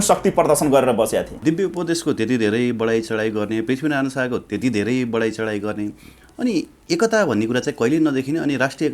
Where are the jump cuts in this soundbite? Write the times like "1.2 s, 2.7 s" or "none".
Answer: 1.4 s